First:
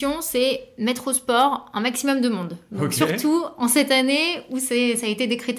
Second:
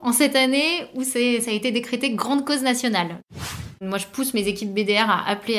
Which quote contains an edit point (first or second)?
second